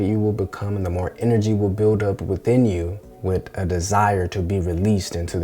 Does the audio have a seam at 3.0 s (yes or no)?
yes